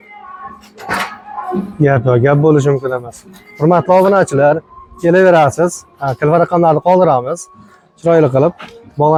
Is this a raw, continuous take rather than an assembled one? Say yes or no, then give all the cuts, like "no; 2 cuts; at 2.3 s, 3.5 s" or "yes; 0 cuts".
yes; 0 cuts